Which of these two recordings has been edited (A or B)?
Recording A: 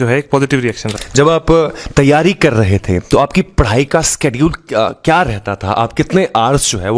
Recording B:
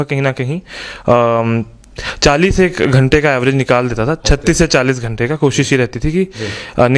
A